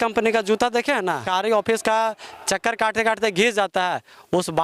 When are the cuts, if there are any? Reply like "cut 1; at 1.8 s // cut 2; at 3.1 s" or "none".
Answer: cut 1; at 1.2 s